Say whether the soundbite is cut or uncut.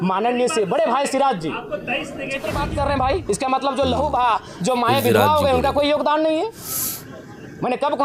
cut